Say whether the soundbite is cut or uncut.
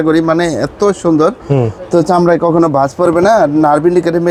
uncut